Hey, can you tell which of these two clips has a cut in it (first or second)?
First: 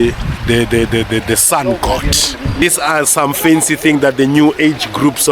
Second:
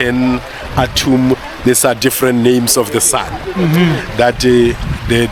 first